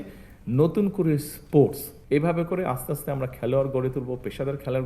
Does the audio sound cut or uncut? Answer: cut